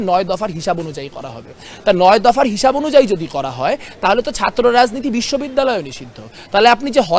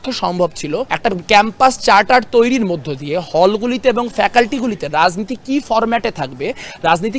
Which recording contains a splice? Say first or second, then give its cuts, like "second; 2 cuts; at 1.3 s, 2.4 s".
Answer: second; 1 cut; at 0.9 s